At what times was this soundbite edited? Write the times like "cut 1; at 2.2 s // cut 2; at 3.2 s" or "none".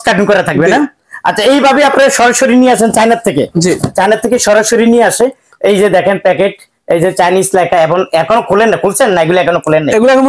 none